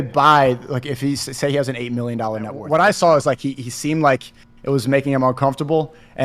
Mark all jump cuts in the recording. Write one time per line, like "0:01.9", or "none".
0:02.6